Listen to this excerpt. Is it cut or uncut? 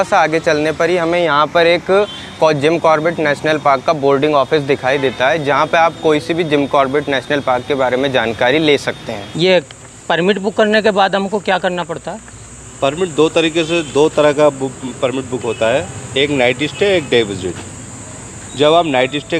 uncut